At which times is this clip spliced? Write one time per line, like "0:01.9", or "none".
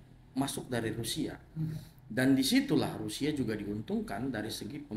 none

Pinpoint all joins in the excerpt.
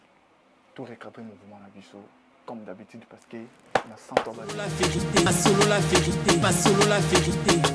0:04.7

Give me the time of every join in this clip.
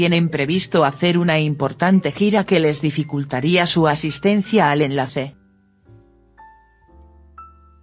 none

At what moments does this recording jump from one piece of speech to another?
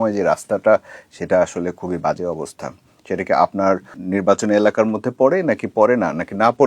0:04.0

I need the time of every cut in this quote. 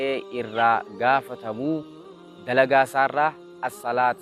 none

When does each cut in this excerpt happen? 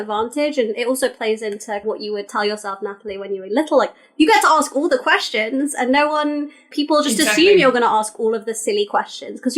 0:01.9
0:06.7

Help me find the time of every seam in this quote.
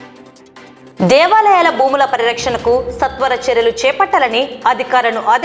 0:00.9

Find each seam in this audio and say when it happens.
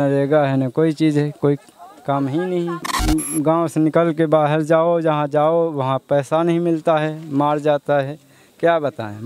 0:02.9

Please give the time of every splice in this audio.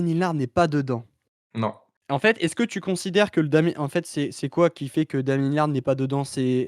0:01.9

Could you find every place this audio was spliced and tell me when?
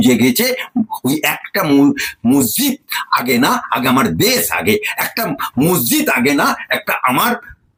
none

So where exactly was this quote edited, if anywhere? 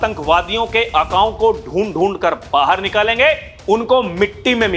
none

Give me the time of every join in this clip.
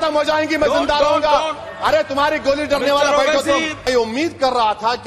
0:03.8

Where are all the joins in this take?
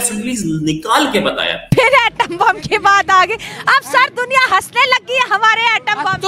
0:01.6

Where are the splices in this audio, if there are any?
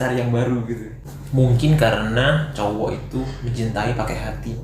0:01.0

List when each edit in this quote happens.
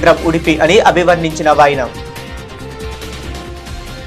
0:01.9

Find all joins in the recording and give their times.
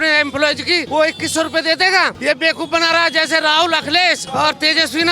0:00.8
0:02.2
0:04.2

